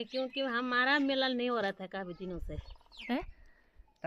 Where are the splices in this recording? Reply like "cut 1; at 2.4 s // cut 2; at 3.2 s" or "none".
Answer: cut 1; at 3.1 s